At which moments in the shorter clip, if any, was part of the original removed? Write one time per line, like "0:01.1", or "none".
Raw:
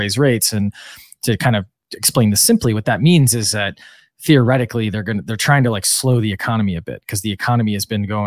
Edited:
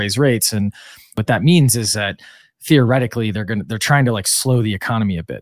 0:01.2